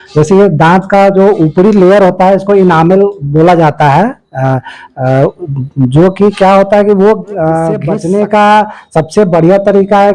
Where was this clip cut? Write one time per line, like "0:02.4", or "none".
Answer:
0:07.9